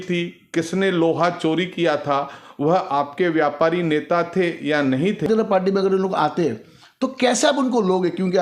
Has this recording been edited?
yes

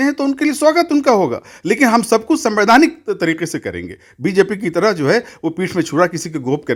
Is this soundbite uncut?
yes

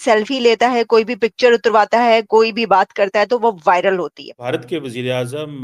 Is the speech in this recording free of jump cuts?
no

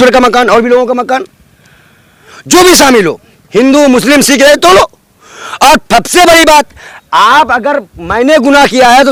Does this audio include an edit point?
no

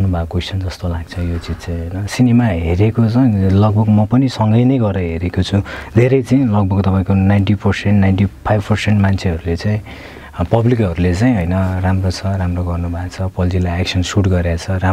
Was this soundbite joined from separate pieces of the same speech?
no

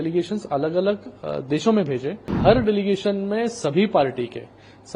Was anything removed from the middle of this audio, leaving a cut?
yes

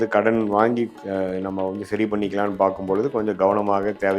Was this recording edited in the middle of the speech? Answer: yes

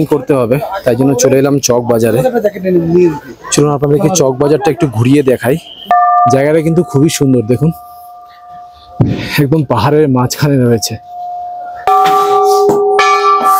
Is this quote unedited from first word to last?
no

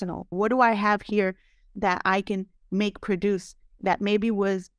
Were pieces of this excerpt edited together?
no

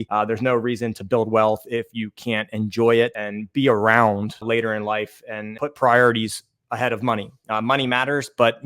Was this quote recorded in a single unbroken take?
no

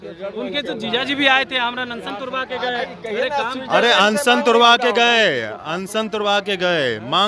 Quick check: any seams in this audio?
no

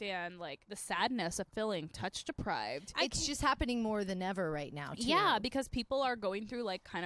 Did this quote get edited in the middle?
no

